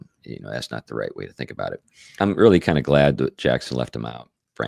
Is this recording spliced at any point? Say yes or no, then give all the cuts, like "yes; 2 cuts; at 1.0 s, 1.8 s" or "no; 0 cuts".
yes; 1 cut; at 2.1 s